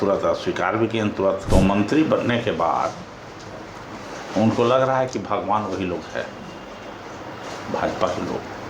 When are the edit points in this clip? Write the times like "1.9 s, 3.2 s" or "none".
1.4 s